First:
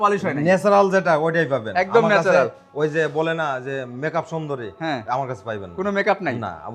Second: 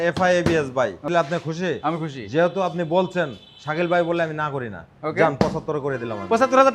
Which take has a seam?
second; 1 cut; at 1.0 s

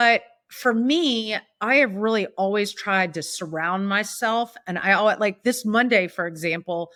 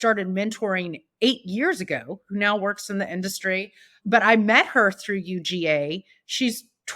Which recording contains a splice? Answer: second; 1 cut; at 4.0 s

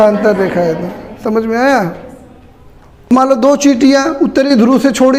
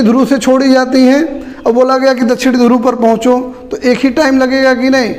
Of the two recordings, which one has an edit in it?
first; 1 cut; at 3.1 s

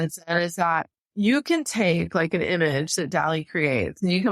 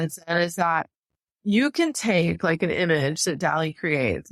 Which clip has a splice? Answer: first; 1 cut; at 1.0 s

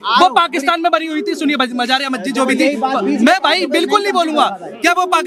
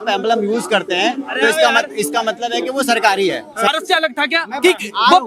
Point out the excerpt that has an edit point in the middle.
second; 1 cut; at 3.7 s

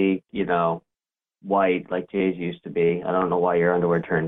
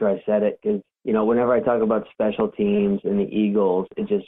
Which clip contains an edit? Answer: second; 1 cut; at 0.9 s

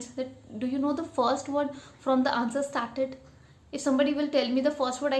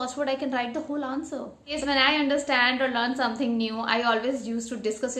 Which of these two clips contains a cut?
second; 1 cut; at 1.7 s

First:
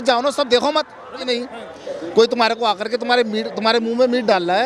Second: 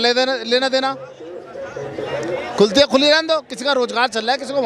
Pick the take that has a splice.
first; 1 cut; at 1.2 s

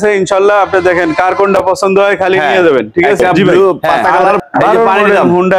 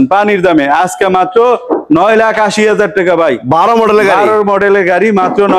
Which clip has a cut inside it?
first; 1 cut; at 4.4 s

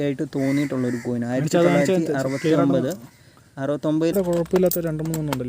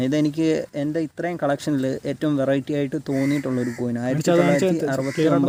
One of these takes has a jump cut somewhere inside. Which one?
first; 1 cut; at 4.1 s

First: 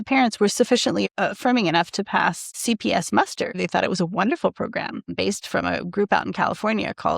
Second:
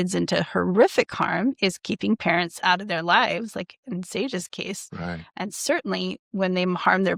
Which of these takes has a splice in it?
first; 4 cuts; at 1.1 s, 2.6 s, 3.6 s, 5.1 s

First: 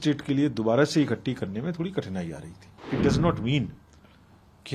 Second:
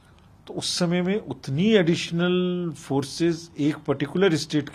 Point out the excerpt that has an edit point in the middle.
first; 1 cut; at 2.7 s

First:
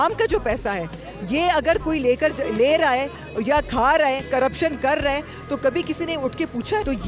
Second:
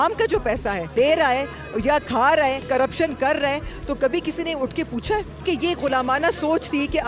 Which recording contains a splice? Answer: second; 2 cuts; at 0.9 s, 5.4 s

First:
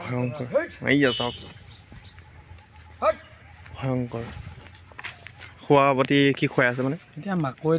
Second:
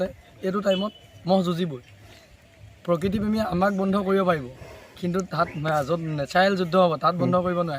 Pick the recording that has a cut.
first; 1 cut; at 5.5 s

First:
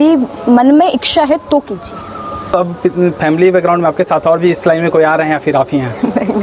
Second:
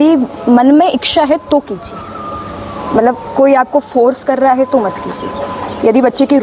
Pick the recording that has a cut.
first; 1 cut; at 2.5 s

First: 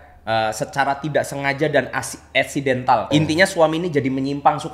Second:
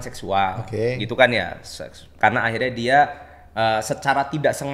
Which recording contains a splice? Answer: first; 1 cut; at 3.1 s

